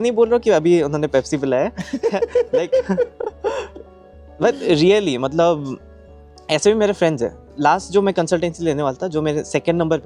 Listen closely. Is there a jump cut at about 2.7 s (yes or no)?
no